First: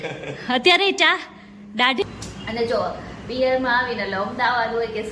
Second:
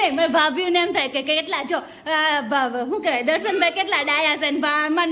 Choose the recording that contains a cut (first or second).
first